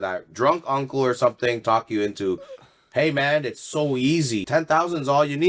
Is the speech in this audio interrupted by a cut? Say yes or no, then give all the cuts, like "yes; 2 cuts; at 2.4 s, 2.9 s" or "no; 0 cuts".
yes; 1 cut; at 4.4 s